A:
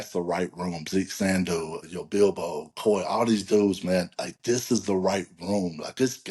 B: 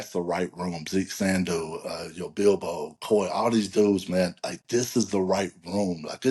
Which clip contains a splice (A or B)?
A